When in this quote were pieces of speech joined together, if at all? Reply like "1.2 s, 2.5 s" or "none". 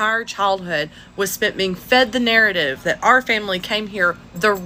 none